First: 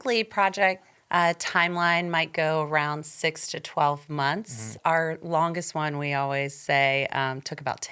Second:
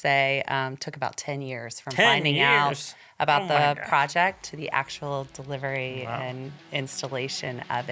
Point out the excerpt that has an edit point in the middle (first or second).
first